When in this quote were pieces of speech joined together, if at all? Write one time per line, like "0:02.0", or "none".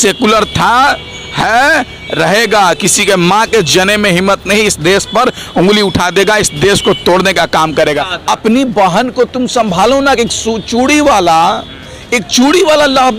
0:08.1